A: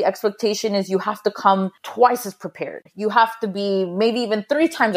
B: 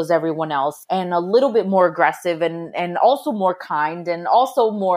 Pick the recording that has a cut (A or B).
A